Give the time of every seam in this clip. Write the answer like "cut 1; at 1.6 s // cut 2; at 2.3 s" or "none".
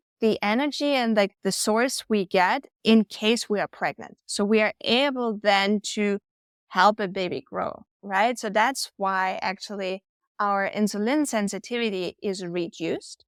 none